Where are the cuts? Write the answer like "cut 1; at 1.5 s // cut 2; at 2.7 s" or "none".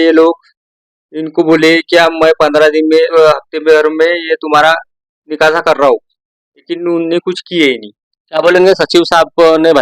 cut 1; at 3.1 s